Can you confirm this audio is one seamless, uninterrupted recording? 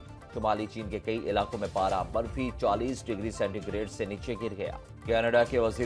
no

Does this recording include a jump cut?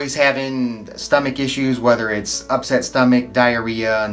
no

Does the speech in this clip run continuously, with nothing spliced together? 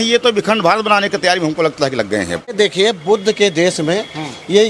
no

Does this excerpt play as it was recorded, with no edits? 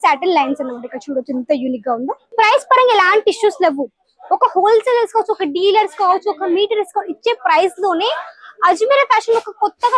no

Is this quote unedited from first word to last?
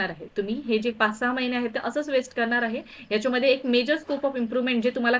yes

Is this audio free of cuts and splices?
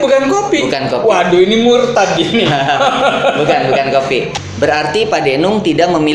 no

